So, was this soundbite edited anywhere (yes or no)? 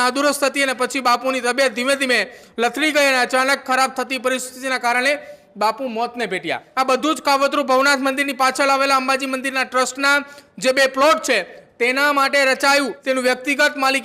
yes